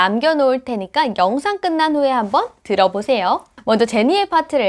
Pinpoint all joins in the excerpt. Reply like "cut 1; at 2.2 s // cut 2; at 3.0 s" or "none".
cut 1; at 3.5 s